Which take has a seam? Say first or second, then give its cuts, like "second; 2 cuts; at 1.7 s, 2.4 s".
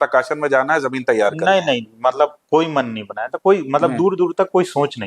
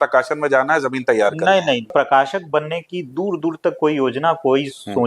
second; 1 cut; at 1.9 s